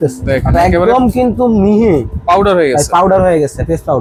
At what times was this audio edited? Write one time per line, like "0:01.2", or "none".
none

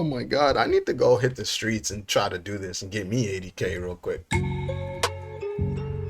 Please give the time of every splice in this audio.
0:04.3

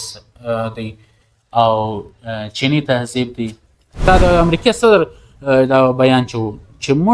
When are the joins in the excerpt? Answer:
0:04.0

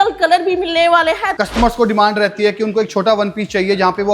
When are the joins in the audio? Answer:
0:01.3

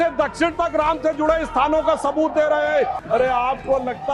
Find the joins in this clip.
0:03.0

